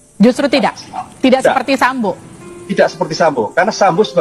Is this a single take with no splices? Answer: yes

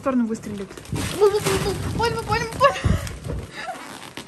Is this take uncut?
yes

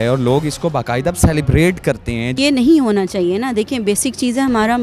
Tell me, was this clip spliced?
yes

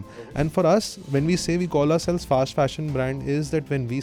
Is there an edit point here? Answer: no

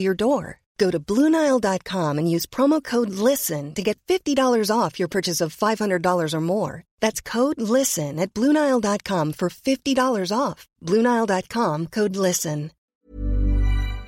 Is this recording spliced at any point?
yes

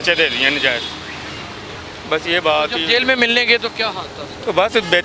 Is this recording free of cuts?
yes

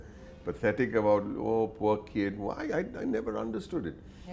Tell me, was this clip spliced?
no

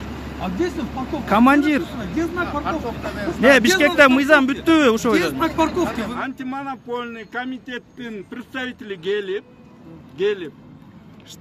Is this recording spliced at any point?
yes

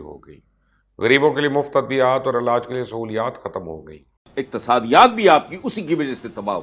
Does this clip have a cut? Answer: yes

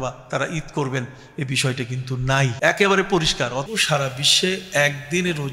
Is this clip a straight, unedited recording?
no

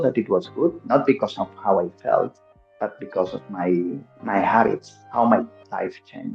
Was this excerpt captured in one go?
yes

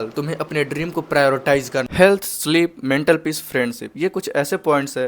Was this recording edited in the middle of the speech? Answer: yes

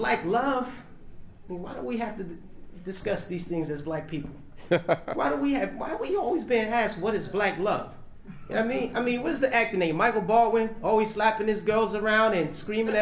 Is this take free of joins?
no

